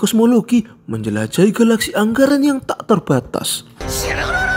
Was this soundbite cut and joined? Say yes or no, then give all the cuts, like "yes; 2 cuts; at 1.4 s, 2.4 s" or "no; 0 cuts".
no; 0 cuts